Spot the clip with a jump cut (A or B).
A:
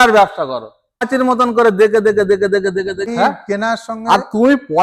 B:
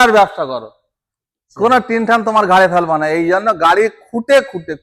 A